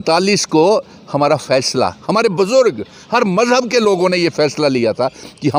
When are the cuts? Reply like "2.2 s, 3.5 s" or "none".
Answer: none